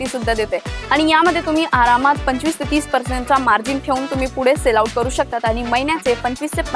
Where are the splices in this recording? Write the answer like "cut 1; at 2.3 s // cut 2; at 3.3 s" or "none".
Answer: none